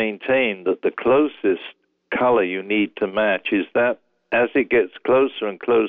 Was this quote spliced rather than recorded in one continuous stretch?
no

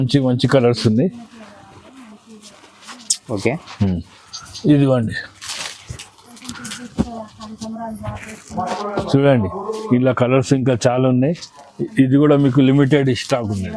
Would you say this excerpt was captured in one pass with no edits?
yes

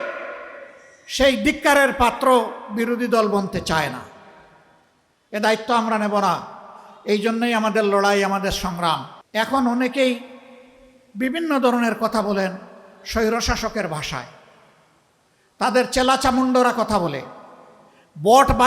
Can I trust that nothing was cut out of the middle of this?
no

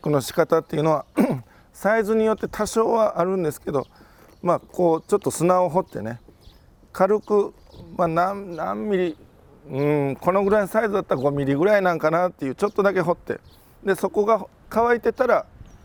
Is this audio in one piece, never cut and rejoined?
yes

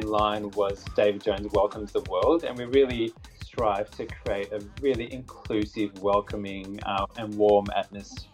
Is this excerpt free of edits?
yes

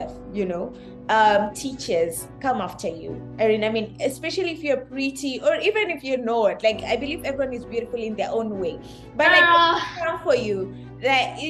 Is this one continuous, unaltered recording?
yes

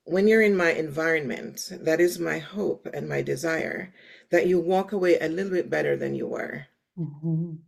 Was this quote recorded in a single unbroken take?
yes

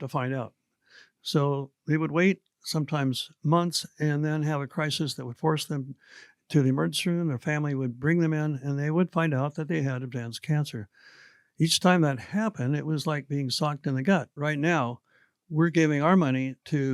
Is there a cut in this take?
yes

